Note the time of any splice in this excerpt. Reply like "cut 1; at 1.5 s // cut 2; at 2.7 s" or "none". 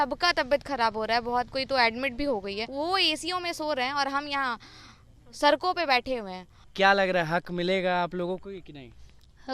cut 1; at 2.7 s // cut 2; at 6.6 s